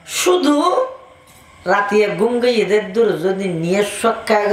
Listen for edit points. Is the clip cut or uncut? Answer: uncut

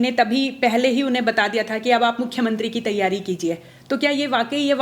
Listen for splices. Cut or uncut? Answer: uncut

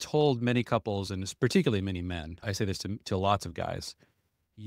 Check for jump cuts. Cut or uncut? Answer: cut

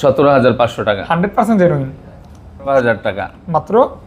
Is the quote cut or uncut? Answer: cut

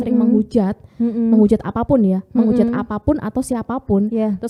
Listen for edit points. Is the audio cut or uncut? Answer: uncut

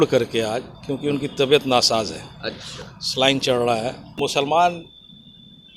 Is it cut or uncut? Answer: cut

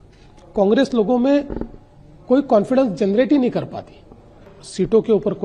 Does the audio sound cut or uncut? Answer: cut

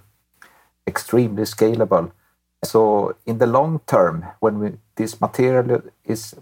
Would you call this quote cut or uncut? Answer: cut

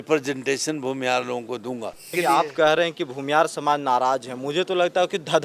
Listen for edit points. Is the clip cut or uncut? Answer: cut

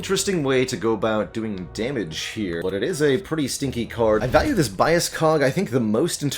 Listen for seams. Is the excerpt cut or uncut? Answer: cut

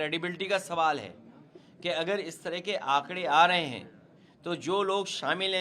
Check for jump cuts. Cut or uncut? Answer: uncut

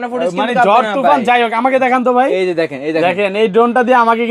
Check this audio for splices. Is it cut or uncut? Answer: uncut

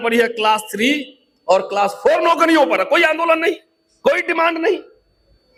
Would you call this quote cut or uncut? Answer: uncut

